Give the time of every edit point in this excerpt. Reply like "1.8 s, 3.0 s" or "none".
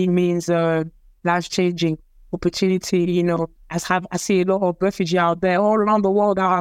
3.6 s